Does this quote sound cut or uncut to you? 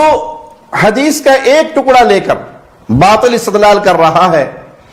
uncut